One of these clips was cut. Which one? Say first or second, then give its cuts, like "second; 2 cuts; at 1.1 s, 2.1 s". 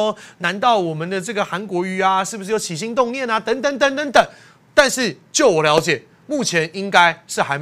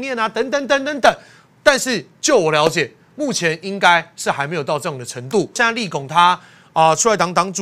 second; 1 cut; at 5.6 s